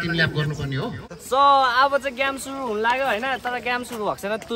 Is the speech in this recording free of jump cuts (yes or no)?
no